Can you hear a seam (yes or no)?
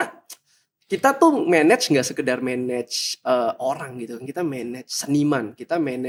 no